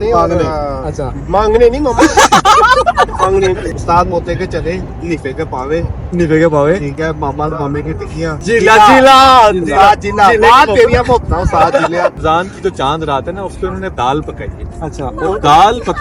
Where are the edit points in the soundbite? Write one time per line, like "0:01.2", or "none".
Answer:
0:03.8
0:05.0
0:08.4
0:12.2